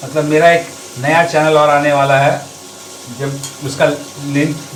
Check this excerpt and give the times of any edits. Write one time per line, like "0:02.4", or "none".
none